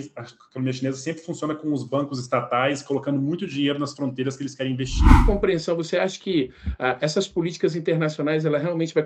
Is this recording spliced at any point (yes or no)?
yes